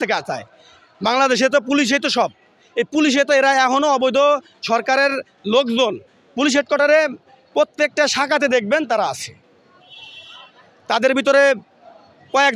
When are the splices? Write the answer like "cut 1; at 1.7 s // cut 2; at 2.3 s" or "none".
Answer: none